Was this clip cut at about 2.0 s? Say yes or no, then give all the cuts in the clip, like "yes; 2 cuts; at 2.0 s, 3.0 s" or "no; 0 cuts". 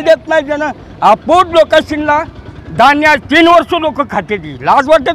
no; 0 cuts